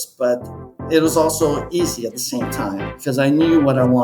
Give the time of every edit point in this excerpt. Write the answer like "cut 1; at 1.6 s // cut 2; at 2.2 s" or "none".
cut 1; at 2.9 s